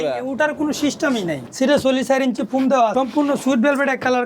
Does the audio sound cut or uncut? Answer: cut